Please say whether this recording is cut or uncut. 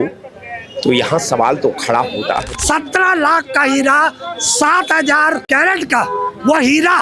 cut